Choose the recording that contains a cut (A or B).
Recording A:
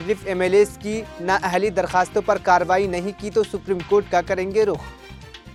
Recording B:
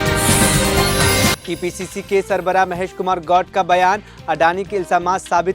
B